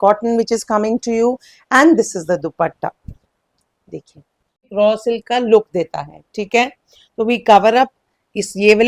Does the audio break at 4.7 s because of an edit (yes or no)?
yes